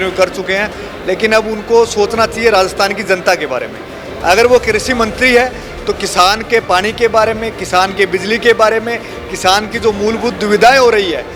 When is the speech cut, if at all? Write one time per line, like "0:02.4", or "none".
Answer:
none